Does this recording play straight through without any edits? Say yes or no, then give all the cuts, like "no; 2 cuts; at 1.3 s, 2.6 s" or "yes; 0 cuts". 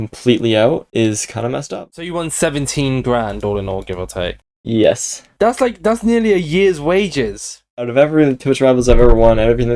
no; 2 cuts; at 1.7 s, 7.6 s